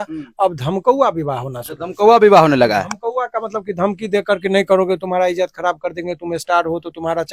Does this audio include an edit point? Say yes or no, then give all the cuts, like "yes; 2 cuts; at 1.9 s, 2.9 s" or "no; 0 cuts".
no; 0 cuts